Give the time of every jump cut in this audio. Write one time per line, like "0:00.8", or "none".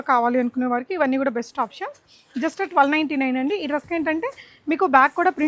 none